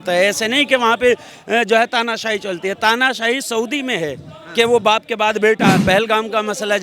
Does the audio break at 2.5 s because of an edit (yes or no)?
no